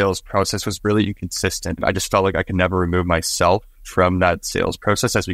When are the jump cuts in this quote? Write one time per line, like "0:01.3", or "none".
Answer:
0:01.8